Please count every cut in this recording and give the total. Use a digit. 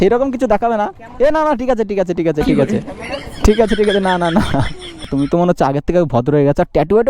2